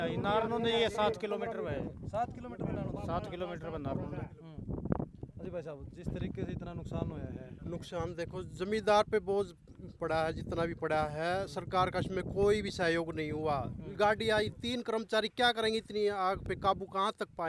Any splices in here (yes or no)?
no